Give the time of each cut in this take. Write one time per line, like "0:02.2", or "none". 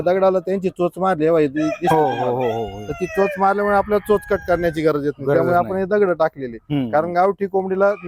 none

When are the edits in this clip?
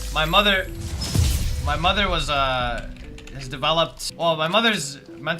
0:04.0

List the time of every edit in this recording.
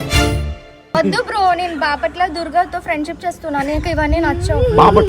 0:00.9

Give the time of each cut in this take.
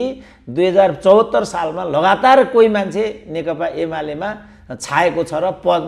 none

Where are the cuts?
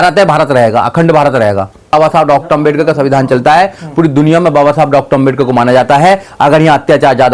0:01.9

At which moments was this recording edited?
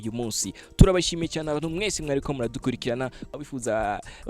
0:03.3

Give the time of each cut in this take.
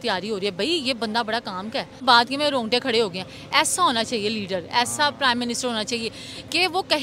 0:02.0

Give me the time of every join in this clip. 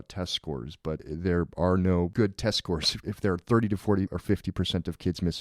0:01.0
0:02.1
0:02.9
0:04.2

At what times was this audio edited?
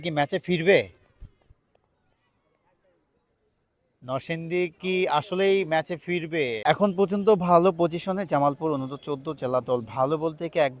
0:06.6

